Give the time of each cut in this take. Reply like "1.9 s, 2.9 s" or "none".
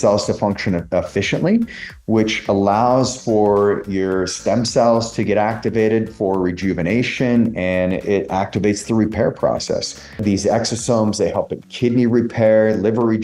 10.2 s